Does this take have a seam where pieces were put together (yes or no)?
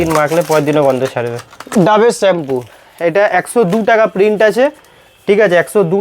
yes